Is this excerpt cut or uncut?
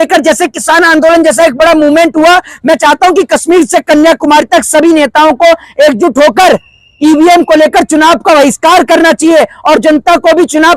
uncut